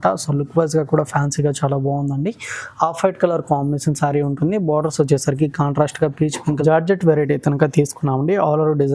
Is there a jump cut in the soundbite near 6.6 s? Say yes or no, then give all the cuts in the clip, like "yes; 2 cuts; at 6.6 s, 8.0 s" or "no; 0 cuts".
yes; 1 cut; at 6.6 s